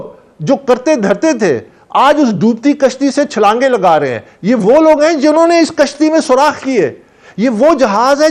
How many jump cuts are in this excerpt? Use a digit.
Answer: 0